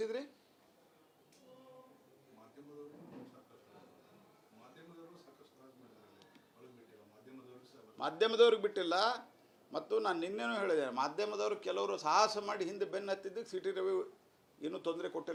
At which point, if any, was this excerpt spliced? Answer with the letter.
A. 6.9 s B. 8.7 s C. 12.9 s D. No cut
D